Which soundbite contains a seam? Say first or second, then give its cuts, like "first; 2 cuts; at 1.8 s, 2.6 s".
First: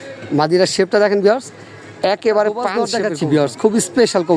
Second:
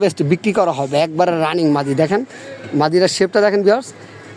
first; 1 cut; at 3.0 s